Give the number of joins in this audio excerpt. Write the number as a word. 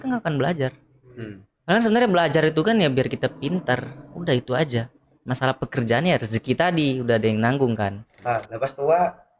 one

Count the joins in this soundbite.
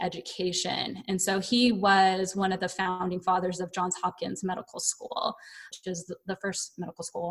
one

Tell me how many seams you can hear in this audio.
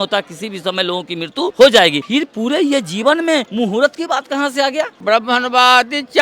four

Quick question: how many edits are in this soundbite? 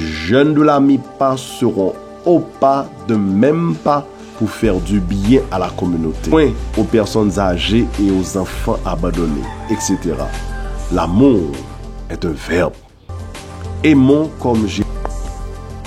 two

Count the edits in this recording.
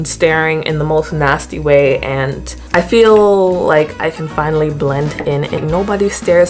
two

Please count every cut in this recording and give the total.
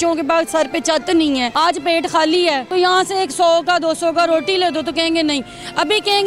two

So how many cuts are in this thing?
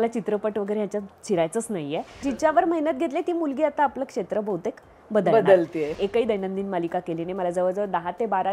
two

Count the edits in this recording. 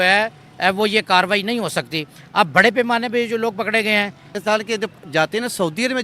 one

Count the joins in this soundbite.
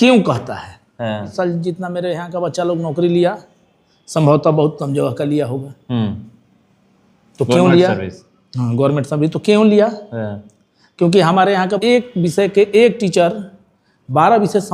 two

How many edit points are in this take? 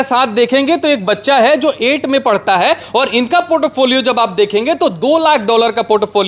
zero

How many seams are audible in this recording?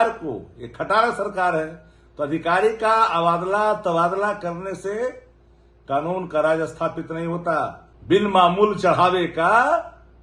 one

